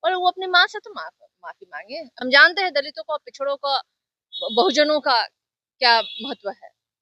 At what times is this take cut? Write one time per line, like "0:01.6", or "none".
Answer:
0:02.1